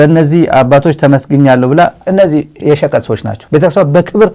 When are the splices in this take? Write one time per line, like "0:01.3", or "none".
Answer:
0:02.0
0:03.3